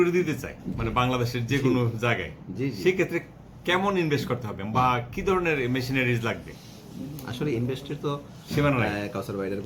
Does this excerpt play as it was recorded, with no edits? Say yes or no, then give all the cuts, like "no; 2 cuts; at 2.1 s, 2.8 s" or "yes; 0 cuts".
yes; 0 cuts